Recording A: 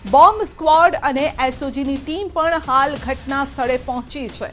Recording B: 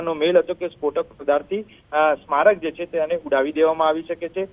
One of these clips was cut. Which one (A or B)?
B